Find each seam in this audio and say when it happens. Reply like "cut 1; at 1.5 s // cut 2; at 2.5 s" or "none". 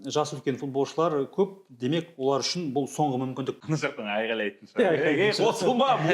cut 1; at 3.6 s